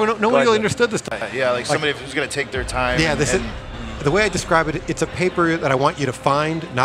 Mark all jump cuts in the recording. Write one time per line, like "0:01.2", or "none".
0:01.2